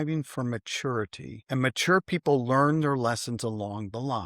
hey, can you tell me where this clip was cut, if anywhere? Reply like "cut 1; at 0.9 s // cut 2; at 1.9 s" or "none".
cut 1; at 1.4 s